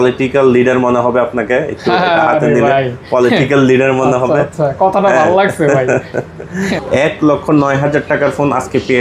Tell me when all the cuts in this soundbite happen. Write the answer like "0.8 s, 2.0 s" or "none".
6.8 s